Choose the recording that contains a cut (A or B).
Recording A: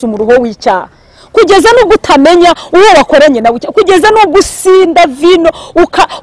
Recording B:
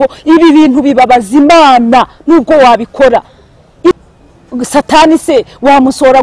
B